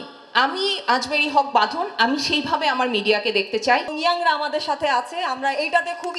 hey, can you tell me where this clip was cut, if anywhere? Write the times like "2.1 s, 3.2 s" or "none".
3.9 s